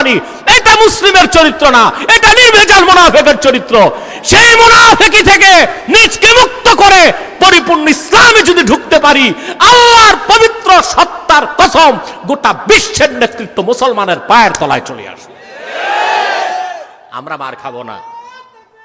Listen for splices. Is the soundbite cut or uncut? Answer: uncut